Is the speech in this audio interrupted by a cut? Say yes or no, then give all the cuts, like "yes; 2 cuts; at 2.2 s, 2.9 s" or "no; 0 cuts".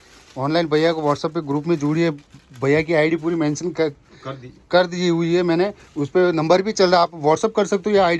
no; 0 cuts